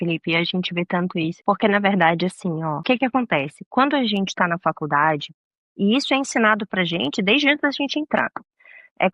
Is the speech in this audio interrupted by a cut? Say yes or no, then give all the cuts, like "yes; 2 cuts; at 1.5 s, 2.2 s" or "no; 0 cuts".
yes; 2 cuts; at 1.4 s, 2.8 s